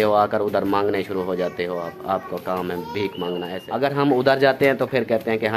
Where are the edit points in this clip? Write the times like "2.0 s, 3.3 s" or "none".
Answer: 3.6 s